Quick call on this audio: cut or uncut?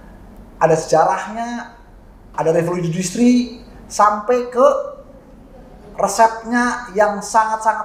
uncut